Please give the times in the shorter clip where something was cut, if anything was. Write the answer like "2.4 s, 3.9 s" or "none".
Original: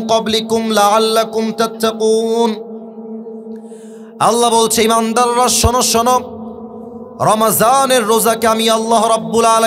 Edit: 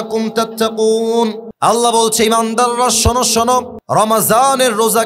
1.5 s, 3.8 s